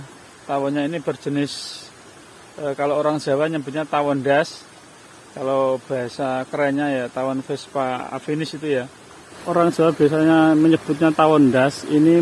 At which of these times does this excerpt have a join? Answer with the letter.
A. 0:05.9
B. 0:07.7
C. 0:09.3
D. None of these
C